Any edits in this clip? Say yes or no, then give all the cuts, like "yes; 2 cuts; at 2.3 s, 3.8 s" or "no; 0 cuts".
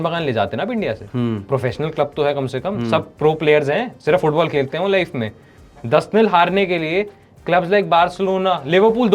no; 0 cuts